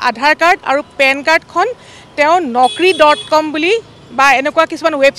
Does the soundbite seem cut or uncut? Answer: uncut